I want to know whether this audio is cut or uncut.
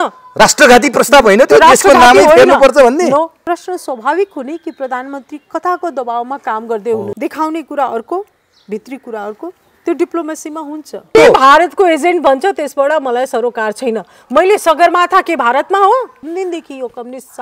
cut